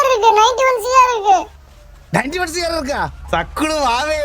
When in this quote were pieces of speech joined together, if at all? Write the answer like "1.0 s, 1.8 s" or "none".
3.1 s